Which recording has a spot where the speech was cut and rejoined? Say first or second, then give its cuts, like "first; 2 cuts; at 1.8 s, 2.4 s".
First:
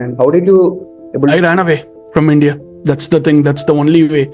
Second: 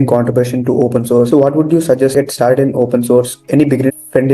second; 1 cut; at 2.1 s